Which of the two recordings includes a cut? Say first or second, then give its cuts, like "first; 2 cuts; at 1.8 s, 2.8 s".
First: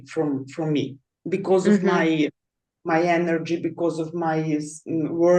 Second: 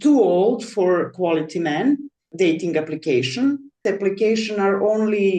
second; 2 cuts; at 2.2 s, 3.8 s